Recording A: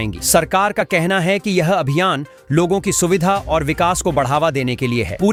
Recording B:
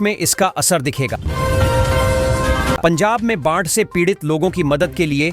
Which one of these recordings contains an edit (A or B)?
B